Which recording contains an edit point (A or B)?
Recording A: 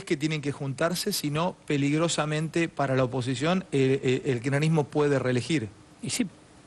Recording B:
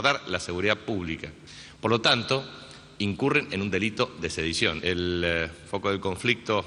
B